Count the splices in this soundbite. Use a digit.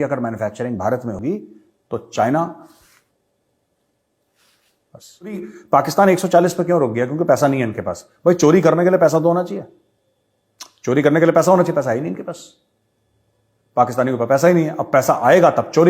2